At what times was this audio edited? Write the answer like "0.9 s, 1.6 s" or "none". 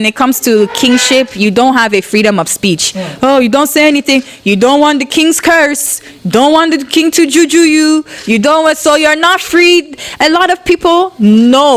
none